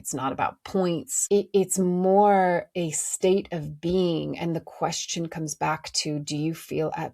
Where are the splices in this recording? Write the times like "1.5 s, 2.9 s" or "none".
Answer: 1.1 s